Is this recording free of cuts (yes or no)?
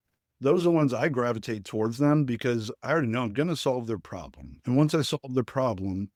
yes